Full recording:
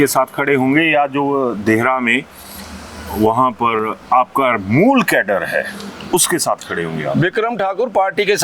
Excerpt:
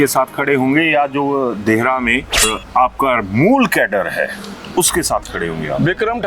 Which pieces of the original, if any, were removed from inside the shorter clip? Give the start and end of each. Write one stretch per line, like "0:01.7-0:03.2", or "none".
0:02.5-0:03.9

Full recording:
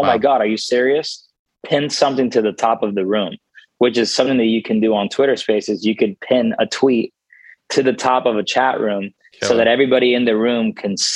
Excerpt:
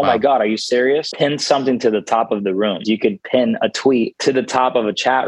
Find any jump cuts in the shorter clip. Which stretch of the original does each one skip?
0:01.1-0:01.6
0:03.3-0:05.8
0:07.1-0:07.6

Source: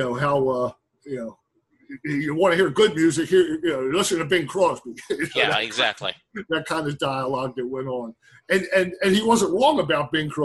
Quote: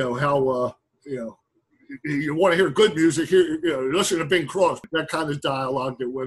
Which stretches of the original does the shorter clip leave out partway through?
0:04.8-0:06.4

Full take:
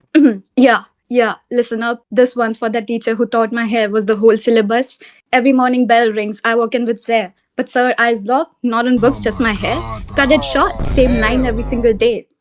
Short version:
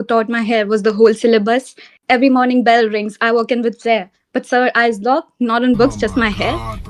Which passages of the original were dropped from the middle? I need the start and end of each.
none

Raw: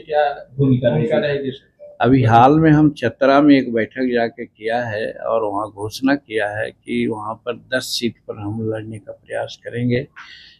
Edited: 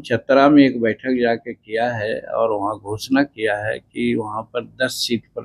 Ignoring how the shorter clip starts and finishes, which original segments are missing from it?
none

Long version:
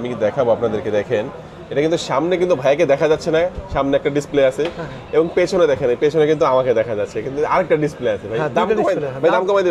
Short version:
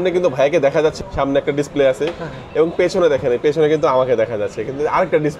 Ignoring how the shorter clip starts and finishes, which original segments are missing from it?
0:03.2-0:03.6

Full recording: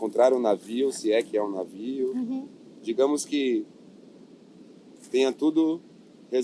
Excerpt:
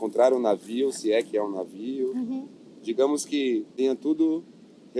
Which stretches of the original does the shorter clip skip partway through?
0:03.7-0:05.1

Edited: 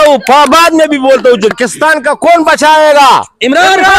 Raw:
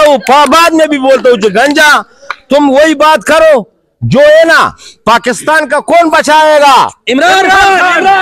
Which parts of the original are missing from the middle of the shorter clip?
0:01.5-0:05.2

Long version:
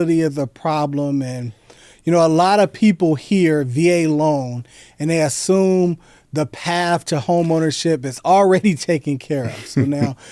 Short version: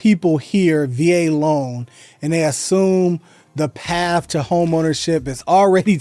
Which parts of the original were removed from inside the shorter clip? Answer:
none

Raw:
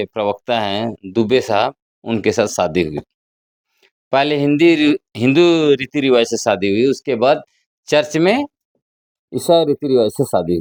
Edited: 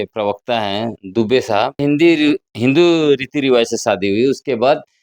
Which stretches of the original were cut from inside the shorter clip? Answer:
0:01.8-0:04.4

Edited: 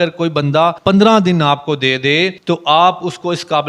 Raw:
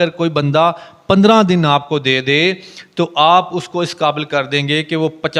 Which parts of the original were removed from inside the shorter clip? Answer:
0:00.8-0:01.0
0:02.6-0:02.9

